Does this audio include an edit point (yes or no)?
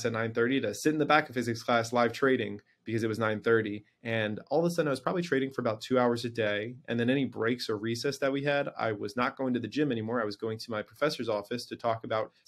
no